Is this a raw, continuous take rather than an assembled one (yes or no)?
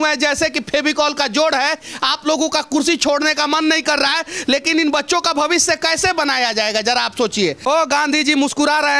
no